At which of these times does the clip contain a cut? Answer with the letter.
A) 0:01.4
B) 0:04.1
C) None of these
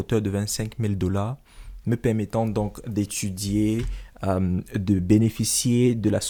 C